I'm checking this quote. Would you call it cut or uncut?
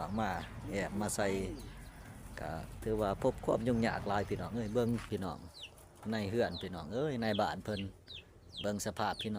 cut